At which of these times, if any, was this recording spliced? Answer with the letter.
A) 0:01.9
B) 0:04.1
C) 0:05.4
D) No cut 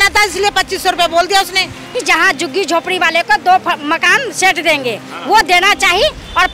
A